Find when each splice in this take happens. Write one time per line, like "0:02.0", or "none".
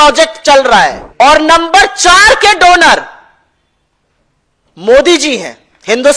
0:01.0

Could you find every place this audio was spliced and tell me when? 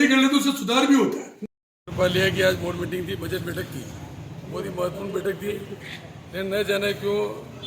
0:01.4

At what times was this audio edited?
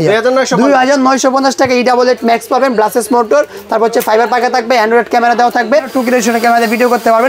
0:05.9

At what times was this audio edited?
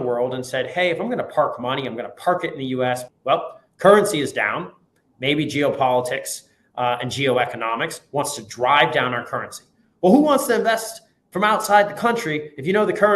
0:03.1

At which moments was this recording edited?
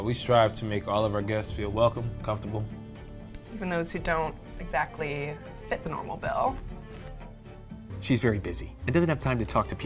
0:07.9

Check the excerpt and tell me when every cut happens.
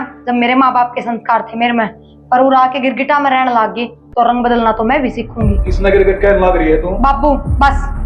none

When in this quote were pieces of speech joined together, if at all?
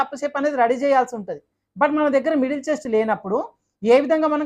none

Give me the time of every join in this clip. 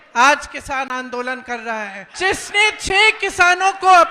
0:02.1

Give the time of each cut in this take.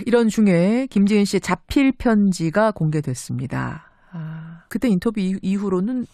0:03.0

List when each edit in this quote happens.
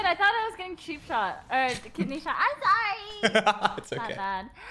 none

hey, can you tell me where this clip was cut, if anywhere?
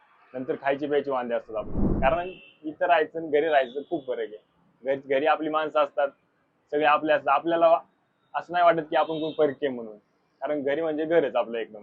0:01.8

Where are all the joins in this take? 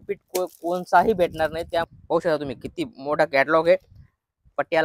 0:01.9

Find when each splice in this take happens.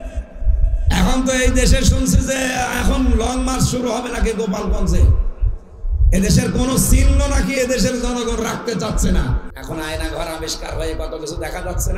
0:09.5

